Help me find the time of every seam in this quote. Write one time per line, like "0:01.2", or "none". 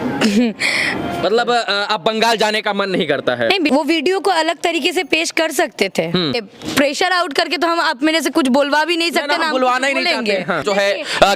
0:01.2
0:03.7
0:06.5
0:10.6